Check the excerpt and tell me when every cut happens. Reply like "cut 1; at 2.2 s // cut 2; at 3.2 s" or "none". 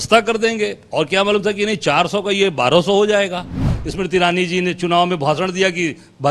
cut 1; at 3.8 s